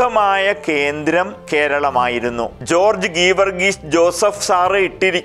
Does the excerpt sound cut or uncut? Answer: cut